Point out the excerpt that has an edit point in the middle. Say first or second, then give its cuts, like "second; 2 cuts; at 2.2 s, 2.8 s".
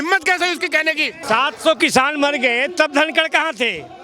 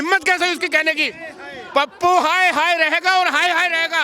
first; 1 cut; at 1.2 s